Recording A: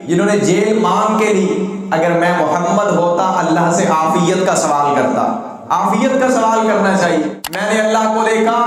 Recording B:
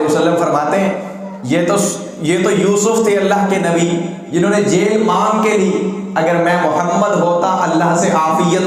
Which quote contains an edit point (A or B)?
A